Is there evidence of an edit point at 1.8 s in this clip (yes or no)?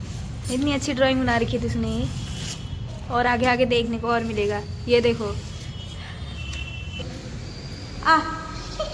no